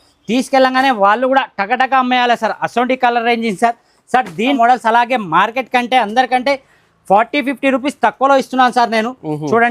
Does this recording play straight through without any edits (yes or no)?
no